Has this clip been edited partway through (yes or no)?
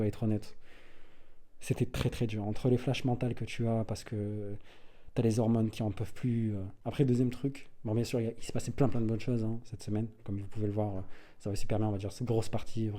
yes